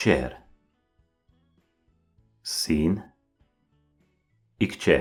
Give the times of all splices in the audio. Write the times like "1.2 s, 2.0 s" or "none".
none